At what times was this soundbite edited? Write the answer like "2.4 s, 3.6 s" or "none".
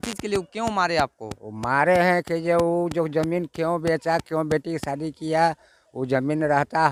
none

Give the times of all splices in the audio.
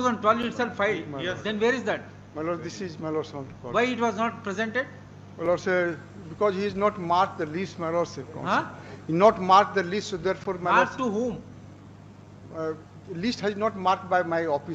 none

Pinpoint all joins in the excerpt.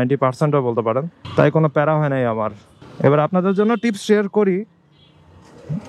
1.2 s

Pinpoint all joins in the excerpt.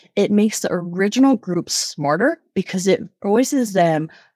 3.1 s

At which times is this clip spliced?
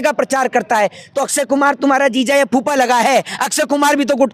none

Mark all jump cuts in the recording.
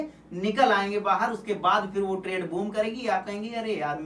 none

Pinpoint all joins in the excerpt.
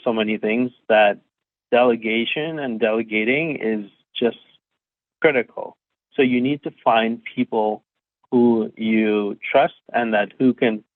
none

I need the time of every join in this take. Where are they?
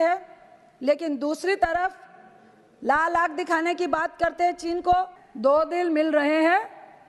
5.2 s

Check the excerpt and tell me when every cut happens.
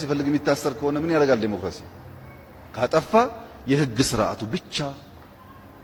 none

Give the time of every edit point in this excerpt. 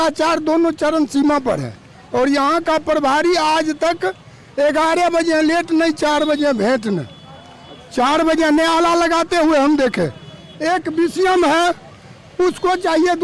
none

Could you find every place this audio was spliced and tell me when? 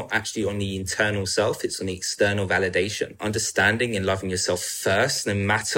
3.2 s

